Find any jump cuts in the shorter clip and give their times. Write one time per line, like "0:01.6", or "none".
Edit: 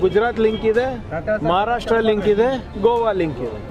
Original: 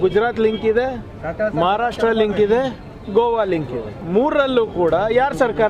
0:01.1
0:02.7